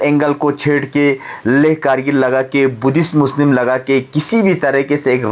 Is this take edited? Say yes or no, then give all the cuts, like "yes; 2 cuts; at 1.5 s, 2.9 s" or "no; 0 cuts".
no; 0 cuts